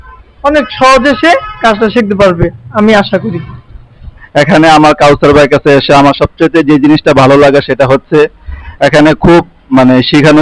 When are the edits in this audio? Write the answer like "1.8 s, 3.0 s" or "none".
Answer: 4.0 s